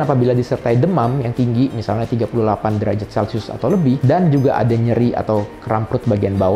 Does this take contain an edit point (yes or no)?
no